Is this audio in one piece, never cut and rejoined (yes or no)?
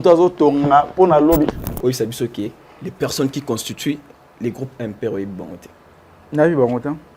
no